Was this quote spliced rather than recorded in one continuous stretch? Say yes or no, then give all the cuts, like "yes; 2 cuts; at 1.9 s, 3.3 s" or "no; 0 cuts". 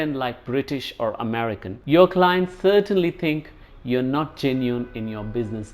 yes; 1 cut; at 1.7 s